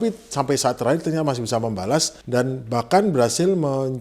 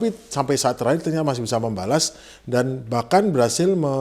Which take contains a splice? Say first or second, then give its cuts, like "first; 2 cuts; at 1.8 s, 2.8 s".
first; 1 cut; at 2.2 s